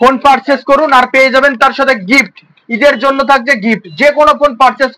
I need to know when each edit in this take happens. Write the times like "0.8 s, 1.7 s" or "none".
none

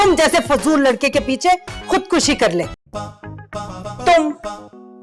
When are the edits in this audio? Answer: 2.8 s

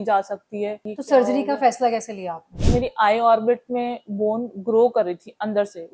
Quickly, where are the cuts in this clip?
0.9 s, 2.6 s

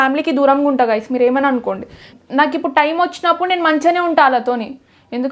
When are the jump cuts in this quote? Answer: 2.1 s

